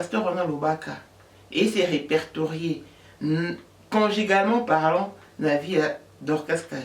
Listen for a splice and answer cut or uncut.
uncut